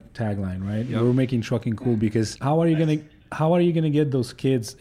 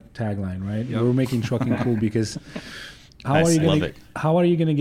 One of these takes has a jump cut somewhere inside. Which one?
first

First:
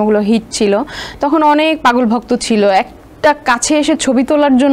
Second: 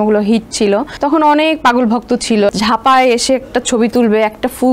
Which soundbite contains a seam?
second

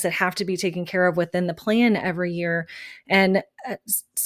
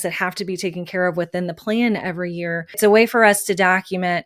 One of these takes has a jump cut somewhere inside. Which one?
second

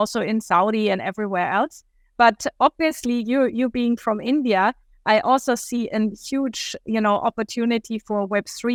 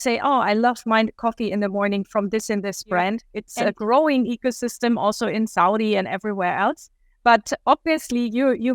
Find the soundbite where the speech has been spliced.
second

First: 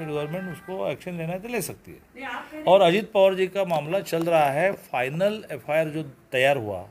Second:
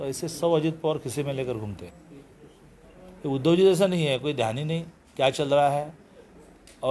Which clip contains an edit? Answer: second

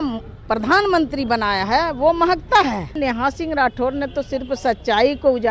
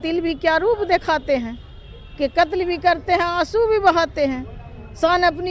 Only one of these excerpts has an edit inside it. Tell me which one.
first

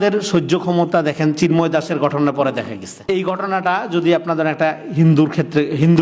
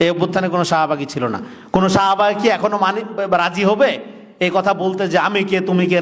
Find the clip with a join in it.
first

